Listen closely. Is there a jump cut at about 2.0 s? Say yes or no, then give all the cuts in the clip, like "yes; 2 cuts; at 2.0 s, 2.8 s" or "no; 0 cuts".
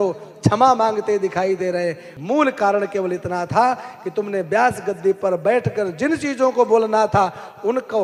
no; 0 cuts